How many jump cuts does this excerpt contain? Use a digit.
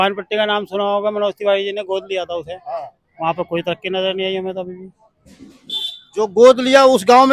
0